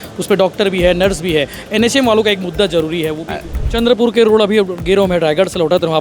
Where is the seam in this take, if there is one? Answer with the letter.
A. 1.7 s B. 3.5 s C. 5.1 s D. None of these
B